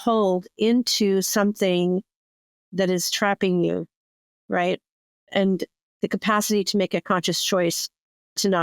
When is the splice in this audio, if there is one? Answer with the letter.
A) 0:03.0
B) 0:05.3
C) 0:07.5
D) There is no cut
B